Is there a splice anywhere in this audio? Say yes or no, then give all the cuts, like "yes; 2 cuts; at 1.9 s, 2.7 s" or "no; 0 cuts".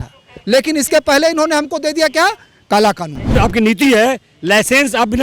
yes; 1 cut; at 3.4 s